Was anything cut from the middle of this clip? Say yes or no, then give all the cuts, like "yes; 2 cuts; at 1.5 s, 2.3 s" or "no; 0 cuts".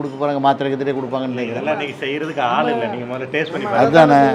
no; 0 cuts